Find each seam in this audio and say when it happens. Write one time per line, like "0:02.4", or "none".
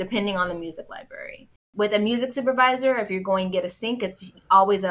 0:01.6